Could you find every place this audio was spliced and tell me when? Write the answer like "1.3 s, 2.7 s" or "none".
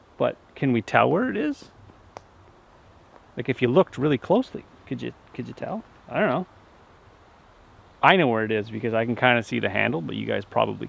none